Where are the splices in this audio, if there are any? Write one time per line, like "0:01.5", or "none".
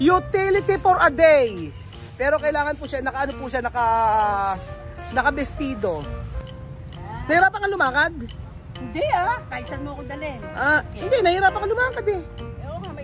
0:06.1

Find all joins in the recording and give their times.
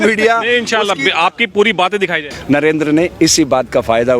0:02.3

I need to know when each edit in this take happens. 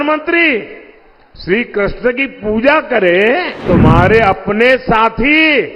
0:03.6

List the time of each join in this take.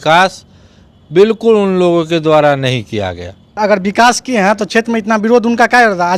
0:03.6

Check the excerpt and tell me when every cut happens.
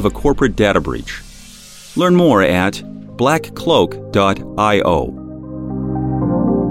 0:05.5

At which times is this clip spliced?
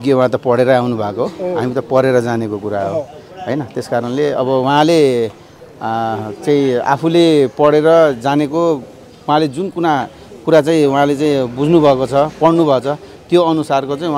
none

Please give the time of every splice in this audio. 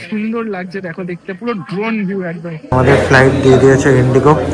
0:02.6

